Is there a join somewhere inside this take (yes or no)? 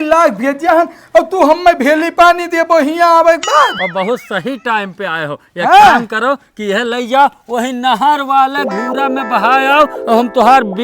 yes